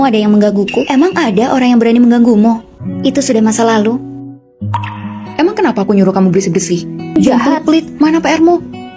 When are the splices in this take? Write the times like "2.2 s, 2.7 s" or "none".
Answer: none